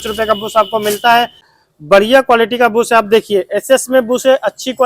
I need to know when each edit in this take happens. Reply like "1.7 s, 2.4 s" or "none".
1.5 s